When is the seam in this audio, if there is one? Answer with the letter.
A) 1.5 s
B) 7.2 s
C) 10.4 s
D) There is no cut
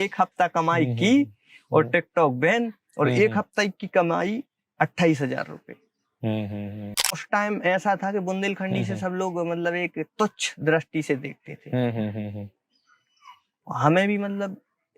B